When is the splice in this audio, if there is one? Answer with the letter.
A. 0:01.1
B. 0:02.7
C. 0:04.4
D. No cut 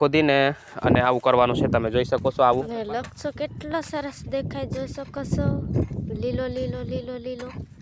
B